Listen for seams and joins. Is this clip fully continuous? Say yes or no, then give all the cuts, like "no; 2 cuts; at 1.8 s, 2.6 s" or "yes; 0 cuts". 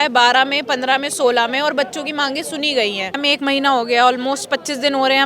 no; 1 cut; at 3.1 s